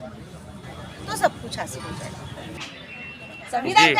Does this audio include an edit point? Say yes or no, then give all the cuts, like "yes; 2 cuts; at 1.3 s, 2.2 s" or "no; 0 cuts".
yes; 1 cut; at 2.6 s